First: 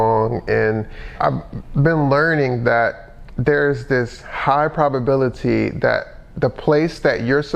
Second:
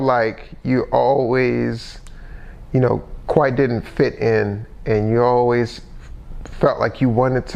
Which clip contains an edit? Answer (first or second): first